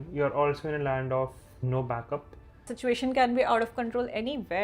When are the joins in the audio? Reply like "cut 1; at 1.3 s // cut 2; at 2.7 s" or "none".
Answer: cut 1; at 2.7 s